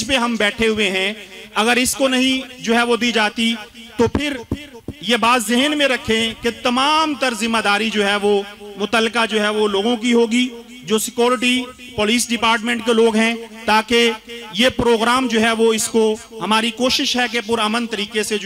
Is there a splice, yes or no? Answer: no